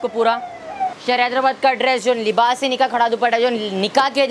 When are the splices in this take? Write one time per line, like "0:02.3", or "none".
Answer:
0:01.0

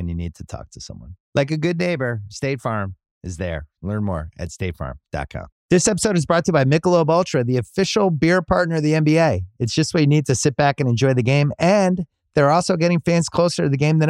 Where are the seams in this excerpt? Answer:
0:05.5

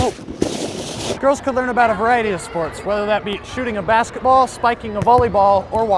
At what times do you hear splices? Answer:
0:01.2

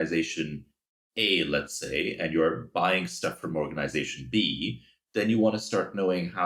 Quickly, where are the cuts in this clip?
none

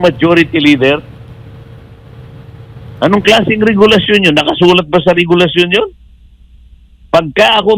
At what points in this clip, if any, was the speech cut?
none

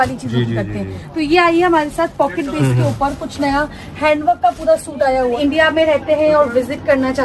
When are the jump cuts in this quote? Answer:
0:05.3

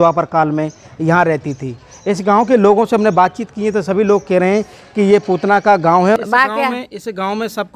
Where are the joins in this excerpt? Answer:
0:06.2

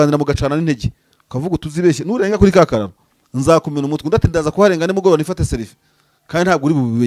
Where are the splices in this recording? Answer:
none

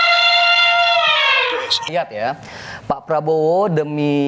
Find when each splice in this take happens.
0:01.9

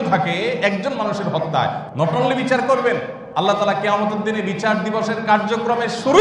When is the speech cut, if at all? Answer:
0:01.8
0:03.2

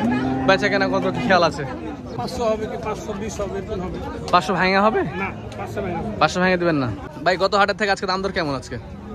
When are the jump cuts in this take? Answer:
0:02.2
0:07.0

